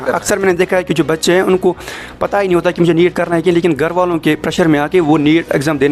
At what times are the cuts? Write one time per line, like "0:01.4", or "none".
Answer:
none